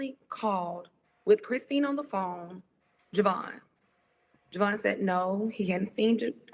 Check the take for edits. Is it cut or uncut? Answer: uncut